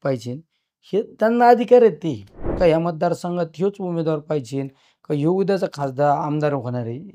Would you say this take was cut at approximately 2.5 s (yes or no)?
yes